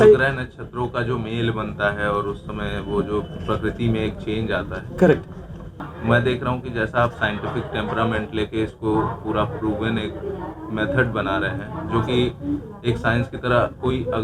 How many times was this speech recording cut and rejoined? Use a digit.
1